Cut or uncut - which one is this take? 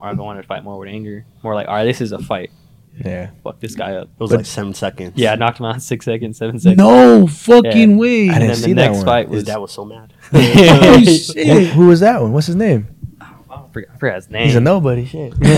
uncut